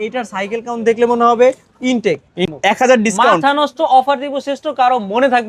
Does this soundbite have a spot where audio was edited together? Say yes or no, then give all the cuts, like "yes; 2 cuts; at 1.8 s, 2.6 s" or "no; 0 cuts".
yes; 1 cut; at 2.4 s